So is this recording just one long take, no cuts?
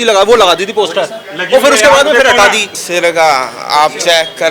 no; 1 cut; at 2.8 s

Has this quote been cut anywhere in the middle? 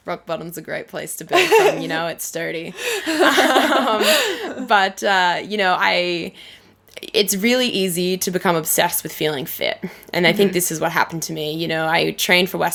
no; 0 cuts

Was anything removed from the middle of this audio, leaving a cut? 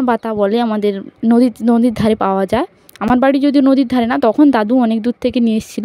no; 0 cuts

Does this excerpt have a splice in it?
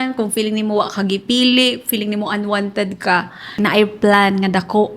yes; 1 cut; at 3.4 s

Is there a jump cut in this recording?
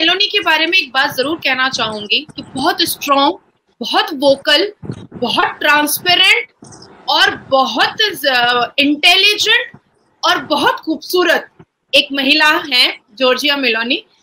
no; 0 cuts

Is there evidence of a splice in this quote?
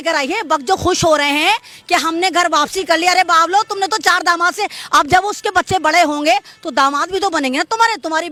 no; 0 cuts

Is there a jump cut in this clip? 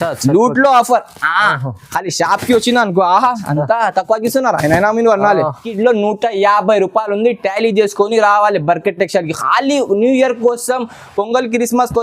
yes; 1 cut; at 5.7 s

